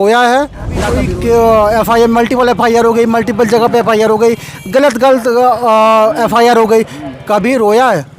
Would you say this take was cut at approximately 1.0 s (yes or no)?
yes